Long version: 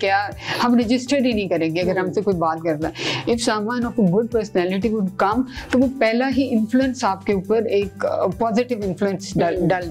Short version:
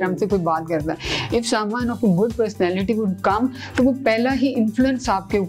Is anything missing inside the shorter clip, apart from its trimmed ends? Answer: no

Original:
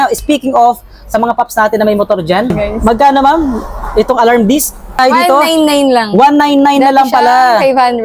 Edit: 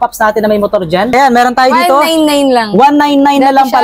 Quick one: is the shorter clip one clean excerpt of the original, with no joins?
no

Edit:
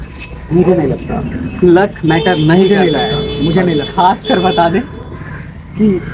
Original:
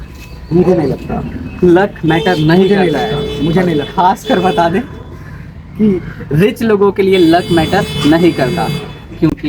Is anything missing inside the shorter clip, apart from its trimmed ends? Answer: no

